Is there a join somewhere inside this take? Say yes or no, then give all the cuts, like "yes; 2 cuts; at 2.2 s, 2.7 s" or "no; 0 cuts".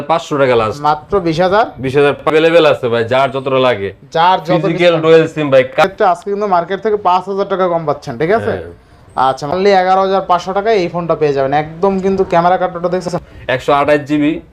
yes; 4 cuts; at 2.2 s, 5.7 s, 9.5 s, 13.1 s